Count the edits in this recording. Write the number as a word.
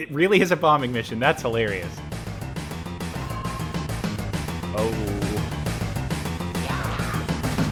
zero